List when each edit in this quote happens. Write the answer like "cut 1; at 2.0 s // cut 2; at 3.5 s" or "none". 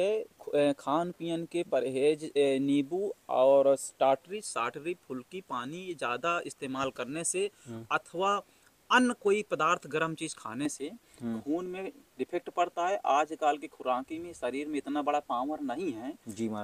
none